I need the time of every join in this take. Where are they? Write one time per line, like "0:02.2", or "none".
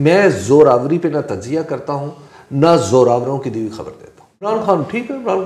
0:04.5